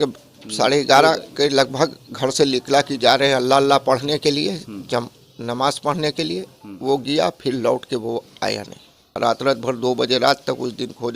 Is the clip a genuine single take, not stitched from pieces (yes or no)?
no